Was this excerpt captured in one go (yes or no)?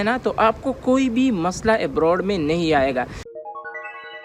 no